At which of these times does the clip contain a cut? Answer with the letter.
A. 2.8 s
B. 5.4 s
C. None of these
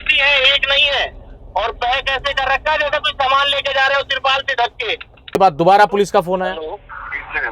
B